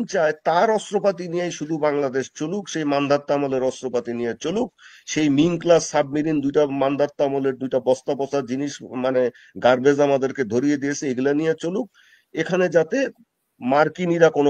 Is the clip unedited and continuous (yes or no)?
yes